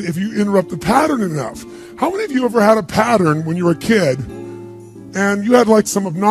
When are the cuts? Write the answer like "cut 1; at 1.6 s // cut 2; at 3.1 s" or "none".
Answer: cut 1; at 1.4 s

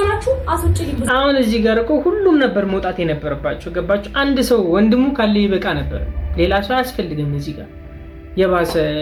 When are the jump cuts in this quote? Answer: none

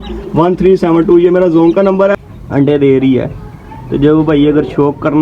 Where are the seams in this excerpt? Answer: cut 1; at 2.1 s

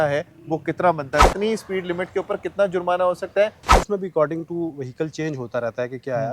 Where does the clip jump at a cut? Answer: cut 1; at 1.2 s // cut 2; at 3.7 s

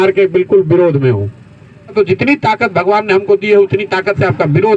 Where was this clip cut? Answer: cut 1; at 1.9 s

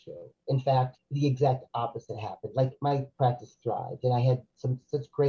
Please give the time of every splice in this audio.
cut 1; at 1.0 s // cut 2; at 2.8 s

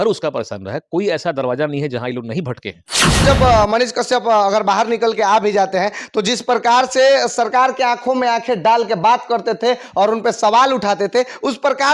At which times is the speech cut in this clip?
cut 1; at 3.2 s

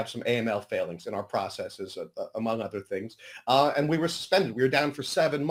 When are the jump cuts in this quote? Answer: none

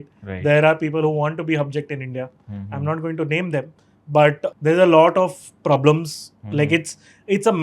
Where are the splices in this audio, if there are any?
cut 1; at 4.5 s

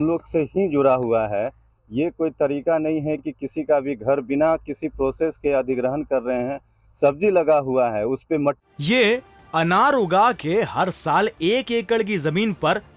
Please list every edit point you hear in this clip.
cut 1; at 8.6 s

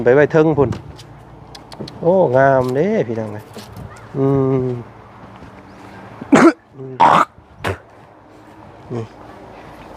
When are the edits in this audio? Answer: none

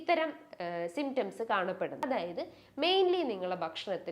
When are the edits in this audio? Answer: cut 1; at 2.0 s

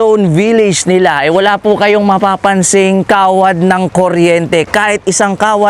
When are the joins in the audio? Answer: none

